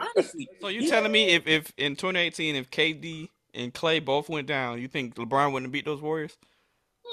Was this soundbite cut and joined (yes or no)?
yes